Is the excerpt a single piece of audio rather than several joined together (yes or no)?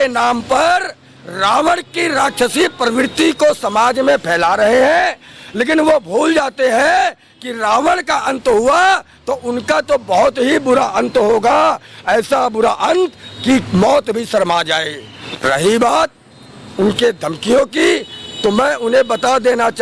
no